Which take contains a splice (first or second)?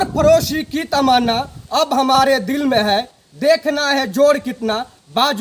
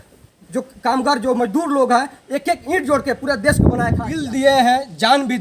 second